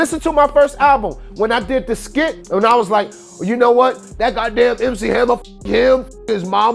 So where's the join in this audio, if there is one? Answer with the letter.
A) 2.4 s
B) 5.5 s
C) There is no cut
A